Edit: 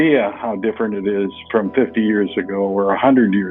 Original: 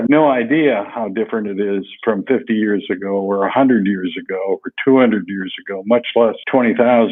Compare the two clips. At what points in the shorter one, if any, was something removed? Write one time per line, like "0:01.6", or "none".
none